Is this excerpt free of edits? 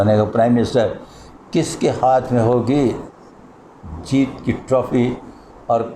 yes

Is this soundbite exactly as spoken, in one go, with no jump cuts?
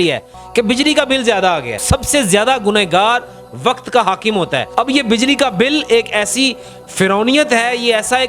no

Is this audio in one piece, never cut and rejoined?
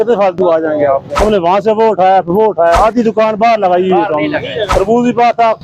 no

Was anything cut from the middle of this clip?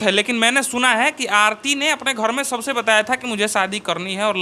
no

